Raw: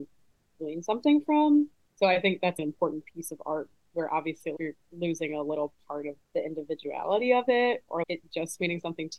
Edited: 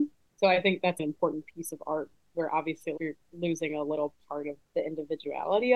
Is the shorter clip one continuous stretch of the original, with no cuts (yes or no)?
yes